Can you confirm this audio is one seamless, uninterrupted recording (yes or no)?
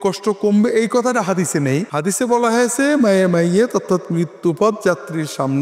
no